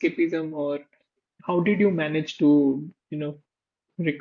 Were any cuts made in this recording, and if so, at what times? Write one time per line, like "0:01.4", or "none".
none